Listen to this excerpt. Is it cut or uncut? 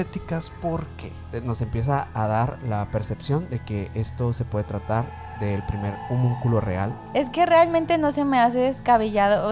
cut